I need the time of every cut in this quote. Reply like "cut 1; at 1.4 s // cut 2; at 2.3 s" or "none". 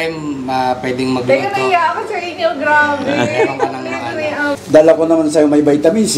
cut 1; at 4.5 s